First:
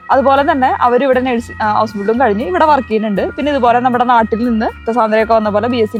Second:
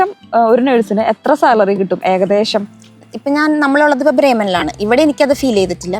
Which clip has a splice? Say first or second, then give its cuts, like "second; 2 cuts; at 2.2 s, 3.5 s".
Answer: second; 1 cut; at 3.0 s